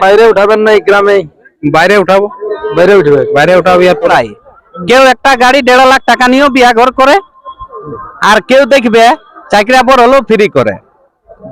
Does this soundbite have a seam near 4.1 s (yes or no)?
yes